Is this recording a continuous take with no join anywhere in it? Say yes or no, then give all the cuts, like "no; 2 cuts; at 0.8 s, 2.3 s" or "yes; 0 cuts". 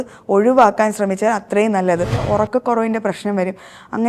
no; 1 cut; at 2.2 s